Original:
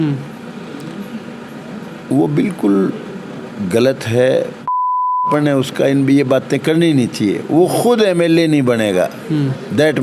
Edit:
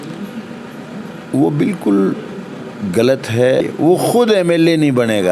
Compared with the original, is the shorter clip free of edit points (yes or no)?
no